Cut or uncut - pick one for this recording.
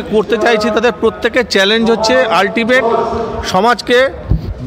uncut